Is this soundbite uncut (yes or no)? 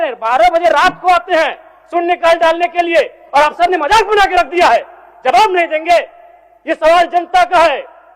yes